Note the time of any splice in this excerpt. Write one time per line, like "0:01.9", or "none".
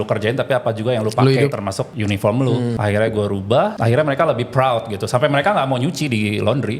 0:01.5
0:02.8
0:03.8